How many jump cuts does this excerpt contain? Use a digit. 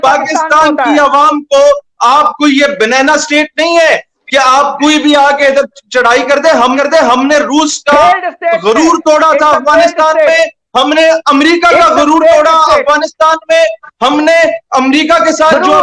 0